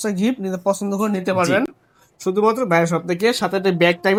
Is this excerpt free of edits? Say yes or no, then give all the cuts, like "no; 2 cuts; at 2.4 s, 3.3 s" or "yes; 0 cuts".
yes; 0 cuts